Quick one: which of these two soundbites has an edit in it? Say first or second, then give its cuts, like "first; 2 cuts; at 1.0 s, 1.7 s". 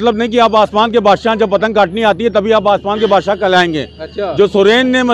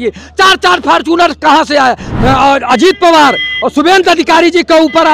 second; 1 cut; at 2.1 s